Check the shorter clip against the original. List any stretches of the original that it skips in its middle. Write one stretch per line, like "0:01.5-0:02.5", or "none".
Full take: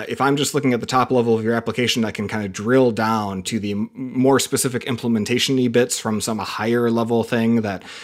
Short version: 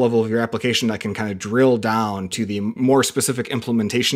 0:03.9-0:04.1